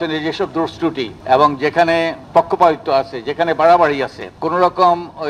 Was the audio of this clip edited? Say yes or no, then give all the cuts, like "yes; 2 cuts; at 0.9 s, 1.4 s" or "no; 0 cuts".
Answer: yes; 3 cuts; at 1.1 s, 2.2 s, 4.3 s